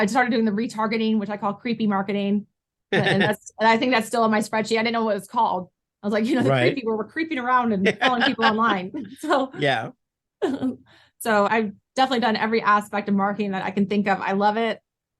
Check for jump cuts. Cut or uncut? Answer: cut